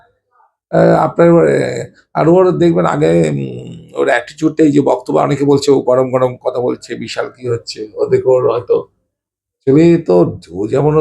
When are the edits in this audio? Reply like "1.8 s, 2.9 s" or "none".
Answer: none